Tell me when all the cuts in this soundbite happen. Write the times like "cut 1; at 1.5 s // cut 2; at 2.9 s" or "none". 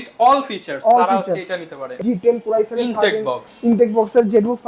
cut 1; at 2.0 s